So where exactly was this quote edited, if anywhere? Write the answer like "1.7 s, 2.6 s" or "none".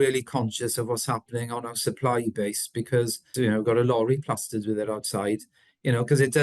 3.2 s